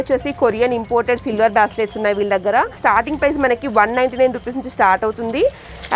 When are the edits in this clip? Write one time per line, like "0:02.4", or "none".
none